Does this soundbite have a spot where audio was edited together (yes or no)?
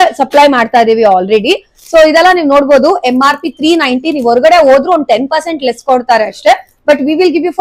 no